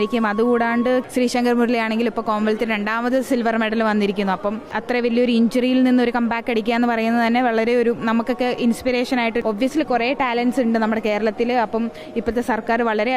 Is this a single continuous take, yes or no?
no